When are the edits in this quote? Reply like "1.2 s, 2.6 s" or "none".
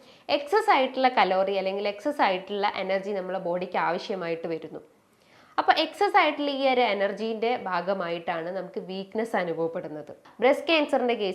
10.3 s